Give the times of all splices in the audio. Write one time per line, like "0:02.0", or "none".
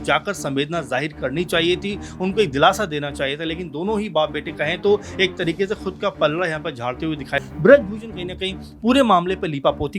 0:07.4